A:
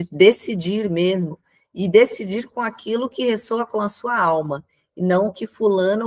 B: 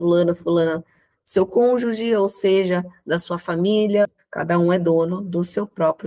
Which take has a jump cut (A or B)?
B